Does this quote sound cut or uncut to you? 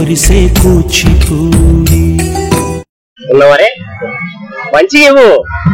cut